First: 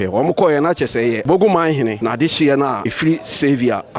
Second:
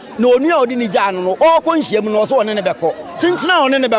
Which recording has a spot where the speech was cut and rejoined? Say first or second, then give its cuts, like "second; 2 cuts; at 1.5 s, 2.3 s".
first; 3 cuts; at 1.2 s, 2.0 s, 2.9 s